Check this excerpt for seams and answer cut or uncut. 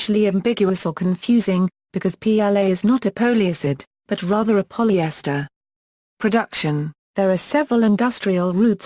cut